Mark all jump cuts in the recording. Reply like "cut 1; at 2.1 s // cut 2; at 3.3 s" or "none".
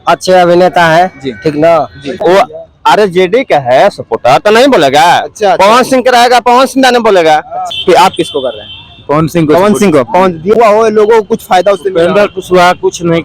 cut 1; at 2.2 s // cut 2; at 7.6 s // cut 3; at 10.6 s